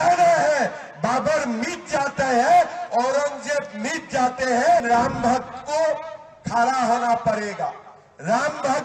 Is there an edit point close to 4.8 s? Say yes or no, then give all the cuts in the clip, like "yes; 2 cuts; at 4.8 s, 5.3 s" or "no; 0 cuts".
yes; 1 cut; at 4.8 s